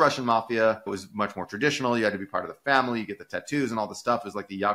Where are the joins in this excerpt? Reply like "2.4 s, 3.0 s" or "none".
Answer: 0.9 s